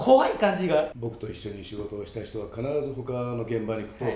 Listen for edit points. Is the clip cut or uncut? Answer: cut